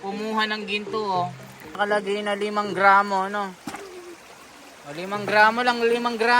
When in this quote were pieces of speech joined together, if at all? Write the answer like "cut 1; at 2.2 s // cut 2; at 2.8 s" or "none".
cut 1; at 1.8 s